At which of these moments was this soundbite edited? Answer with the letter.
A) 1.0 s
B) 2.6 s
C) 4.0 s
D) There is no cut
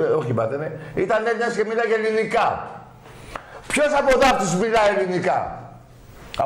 B